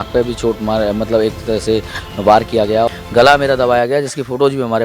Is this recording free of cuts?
no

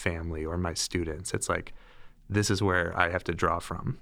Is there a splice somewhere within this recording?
no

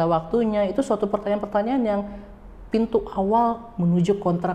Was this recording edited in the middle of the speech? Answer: no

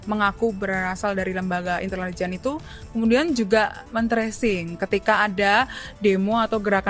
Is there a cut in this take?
no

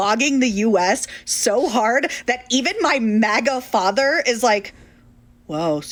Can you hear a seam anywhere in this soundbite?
no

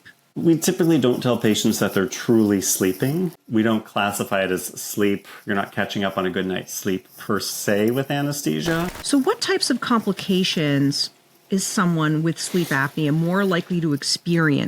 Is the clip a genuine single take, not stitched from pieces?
no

